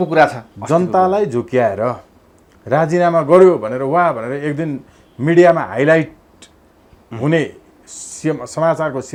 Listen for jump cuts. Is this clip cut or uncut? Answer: uncut